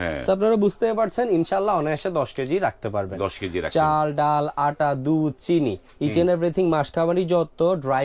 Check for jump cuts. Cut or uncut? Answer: uncut